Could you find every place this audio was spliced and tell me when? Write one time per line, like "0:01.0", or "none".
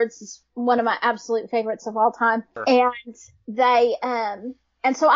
0:02.5